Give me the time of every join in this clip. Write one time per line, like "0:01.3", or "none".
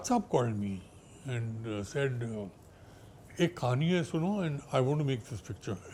none